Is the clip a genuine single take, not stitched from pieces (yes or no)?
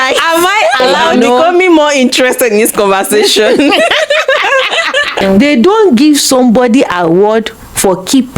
no